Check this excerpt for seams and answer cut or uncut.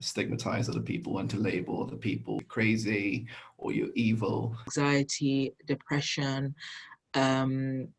cut